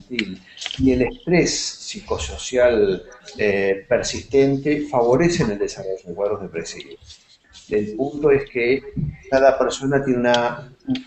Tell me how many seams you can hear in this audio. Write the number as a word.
one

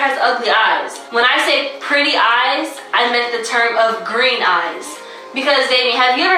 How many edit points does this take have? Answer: one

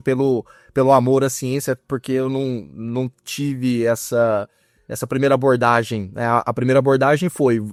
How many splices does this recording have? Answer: zero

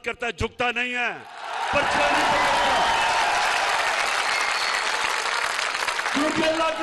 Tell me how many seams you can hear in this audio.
zero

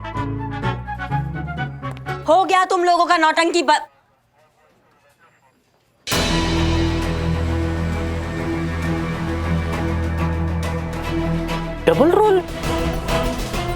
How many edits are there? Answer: two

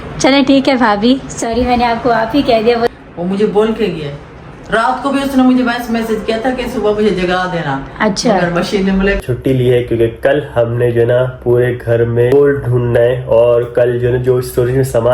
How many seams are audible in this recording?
two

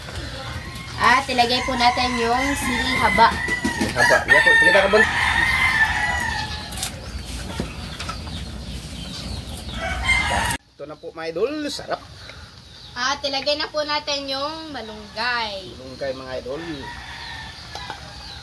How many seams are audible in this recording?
two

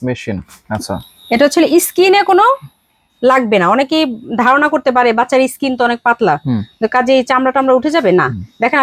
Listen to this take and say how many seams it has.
zero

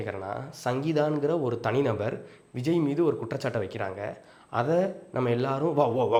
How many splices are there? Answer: zero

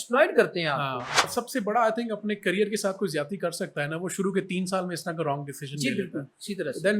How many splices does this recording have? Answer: one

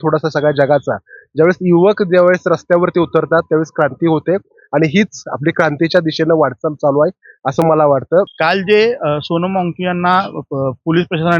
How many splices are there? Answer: one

